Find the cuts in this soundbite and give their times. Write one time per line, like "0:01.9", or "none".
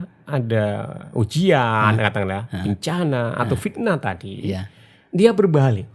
none